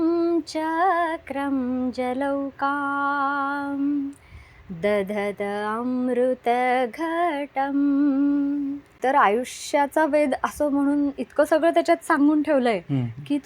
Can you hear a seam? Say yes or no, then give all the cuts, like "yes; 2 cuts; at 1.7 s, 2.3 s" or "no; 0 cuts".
yes; 1 cut; at 8.9 s